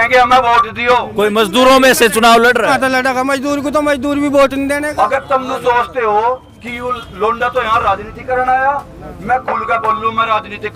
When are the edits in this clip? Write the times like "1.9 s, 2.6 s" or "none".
1.1 s, 2.7 s, 4.9 s